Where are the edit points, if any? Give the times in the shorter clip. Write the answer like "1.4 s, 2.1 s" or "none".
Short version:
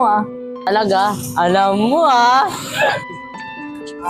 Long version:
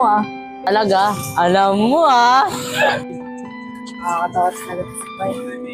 none